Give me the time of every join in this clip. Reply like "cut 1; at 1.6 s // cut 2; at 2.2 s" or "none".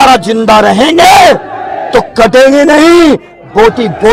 none